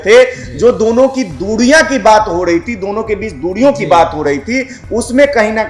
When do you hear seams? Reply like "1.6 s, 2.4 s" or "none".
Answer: none